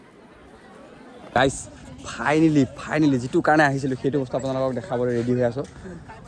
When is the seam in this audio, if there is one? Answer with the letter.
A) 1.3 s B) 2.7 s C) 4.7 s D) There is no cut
A